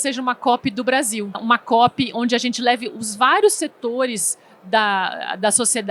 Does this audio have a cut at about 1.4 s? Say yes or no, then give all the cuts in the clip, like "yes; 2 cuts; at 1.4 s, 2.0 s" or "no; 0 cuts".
yes; 1 cut; at 1.4 s